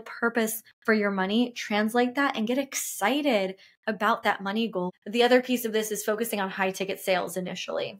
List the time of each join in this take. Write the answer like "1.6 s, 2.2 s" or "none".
4.9 s